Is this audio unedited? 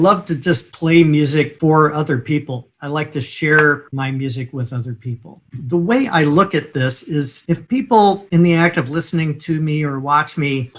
yes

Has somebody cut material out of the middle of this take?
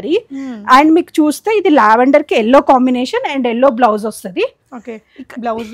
no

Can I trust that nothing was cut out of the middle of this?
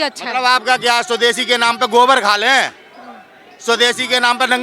yes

